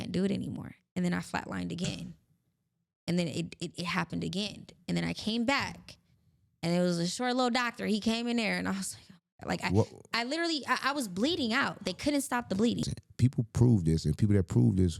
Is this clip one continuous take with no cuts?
no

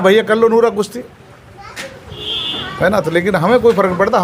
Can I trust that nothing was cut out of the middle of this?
yes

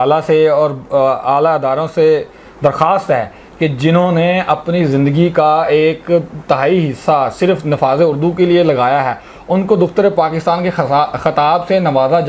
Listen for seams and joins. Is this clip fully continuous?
yes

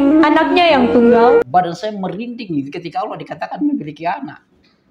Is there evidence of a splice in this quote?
yes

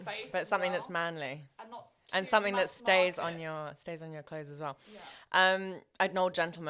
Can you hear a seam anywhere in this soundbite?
no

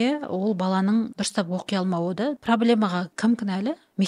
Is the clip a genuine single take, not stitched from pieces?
no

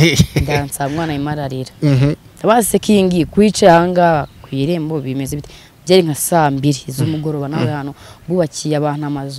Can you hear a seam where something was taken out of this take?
no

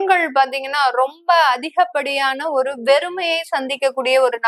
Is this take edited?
no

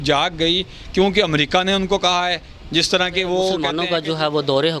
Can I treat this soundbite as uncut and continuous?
no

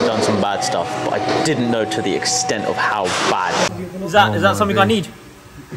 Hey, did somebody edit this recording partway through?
yes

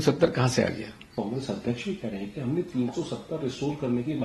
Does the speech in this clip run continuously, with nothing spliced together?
yes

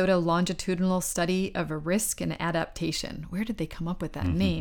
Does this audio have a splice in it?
no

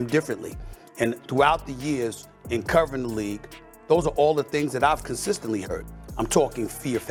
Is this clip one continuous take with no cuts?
yes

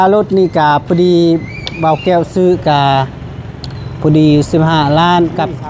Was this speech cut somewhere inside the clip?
no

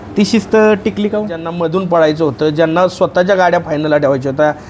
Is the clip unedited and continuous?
no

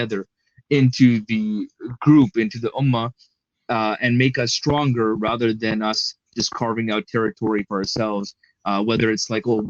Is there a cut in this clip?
no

